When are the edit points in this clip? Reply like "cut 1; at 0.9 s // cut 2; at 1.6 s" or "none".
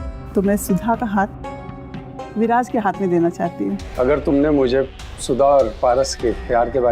cut 1; at 3.8 s